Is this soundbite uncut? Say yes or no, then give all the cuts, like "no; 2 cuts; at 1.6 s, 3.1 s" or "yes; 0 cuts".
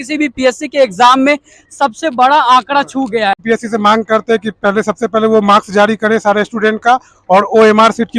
no; 1 cut; at 3.4 s